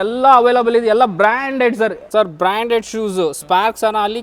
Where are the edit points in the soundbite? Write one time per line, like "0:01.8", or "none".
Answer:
0:02.0